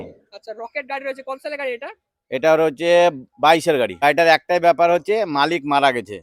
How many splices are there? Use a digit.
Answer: 1